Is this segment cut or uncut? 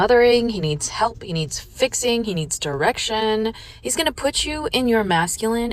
uncut